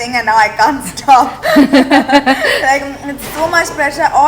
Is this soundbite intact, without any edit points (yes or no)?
yes